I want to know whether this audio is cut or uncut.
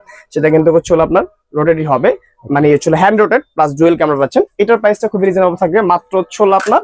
uncut